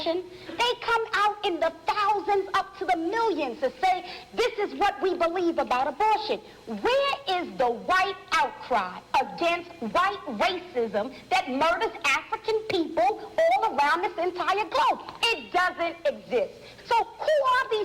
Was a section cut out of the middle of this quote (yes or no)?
no